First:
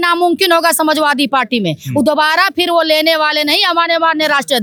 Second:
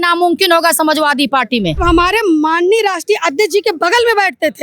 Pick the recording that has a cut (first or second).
second